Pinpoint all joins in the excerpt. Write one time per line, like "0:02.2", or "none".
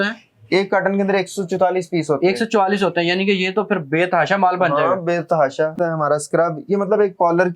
0:05.8